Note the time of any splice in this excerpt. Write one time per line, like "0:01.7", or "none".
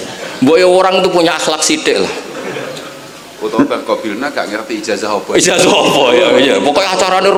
none